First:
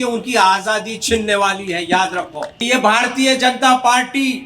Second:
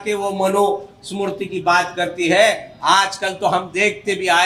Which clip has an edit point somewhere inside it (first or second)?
first